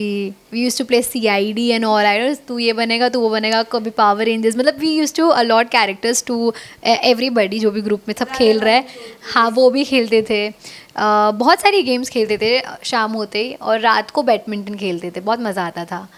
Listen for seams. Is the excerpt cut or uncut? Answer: uncut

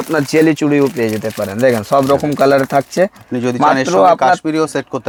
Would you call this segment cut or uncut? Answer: uncut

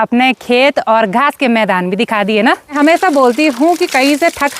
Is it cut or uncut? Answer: cut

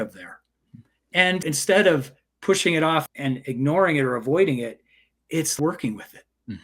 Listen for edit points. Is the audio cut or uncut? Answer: cut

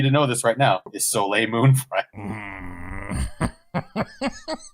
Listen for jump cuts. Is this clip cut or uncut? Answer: cut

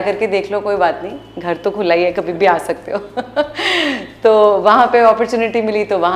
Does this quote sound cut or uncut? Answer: uncut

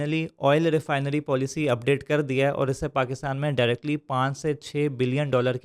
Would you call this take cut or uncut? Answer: uncut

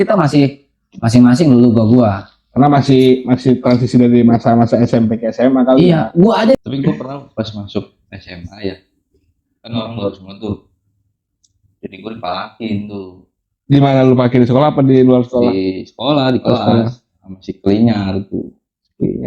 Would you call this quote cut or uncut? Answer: cut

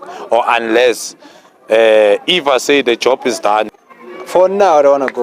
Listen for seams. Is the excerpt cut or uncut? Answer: cut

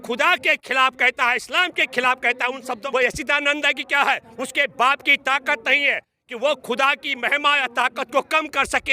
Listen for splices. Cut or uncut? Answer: cut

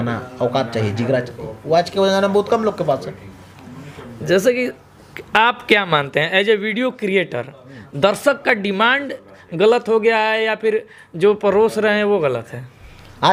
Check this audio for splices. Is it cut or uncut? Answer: uncut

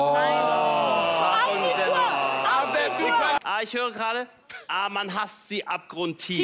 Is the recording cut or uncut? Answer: cut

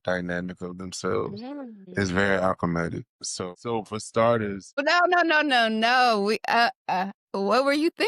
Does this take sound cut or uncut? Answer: cut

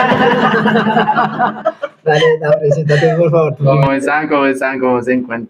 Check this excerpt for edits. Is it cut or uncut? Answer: uncut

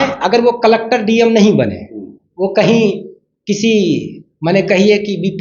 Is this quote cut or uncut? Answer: uncut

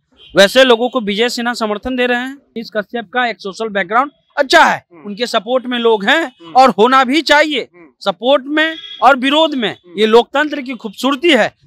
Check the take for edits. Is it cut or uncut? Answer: cut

